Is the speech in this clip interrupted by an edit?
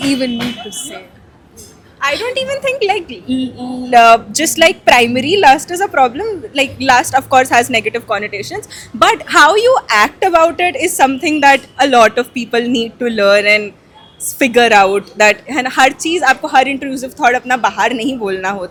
no; 0 cuts

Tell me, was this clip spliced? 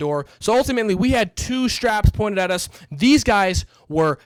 no; 0 cuts

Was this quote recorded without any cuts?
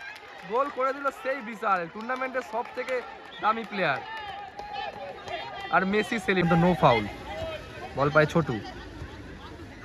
no; 1 cut; at 6.4 s

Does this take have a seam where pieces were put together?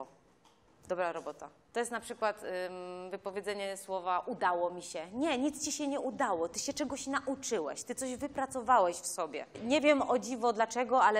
yes; 2 cuts; at 1.5 s, 9.6 s

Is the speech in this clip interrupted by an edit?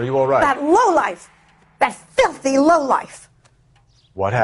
no; 0 cuts

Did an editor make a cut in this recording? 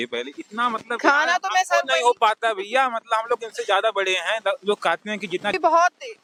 no; 0 cuts

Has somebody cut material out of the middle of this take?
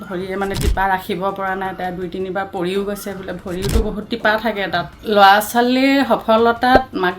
yes; 1 cut; at 4.9 s

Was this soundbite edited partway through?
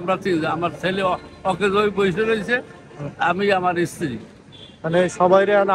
no; 0 cuts

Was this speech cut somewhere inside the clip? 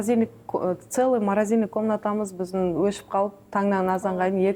no; 0 cuts

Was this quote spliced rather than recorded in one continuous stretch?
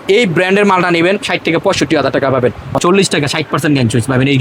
yes; 1 cut; at 2.7 s

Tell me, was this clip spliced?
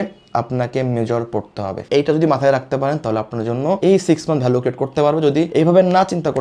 no; 0 cuts

